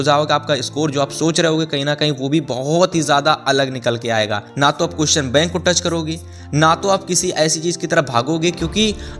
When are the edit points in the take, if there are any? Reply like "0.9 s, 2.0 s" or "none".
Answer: 4.4 s